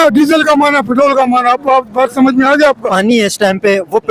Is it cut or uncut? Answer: cut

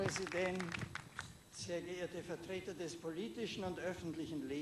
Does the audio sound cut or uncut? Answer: uncut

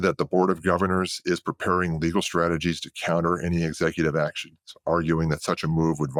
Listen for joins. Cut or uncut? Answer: uncut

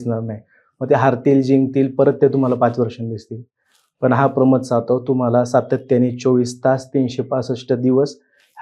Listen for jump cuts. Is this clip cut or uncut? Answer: uncut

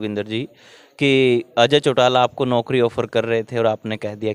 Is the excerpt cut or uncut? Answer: uncut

